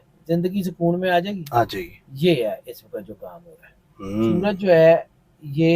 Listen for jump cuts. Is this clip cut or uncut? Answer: cut